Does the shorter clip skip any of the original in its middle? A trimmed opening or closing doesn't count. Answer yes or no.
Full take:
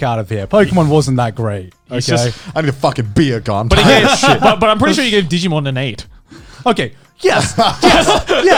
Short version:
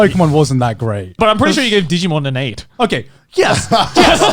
yes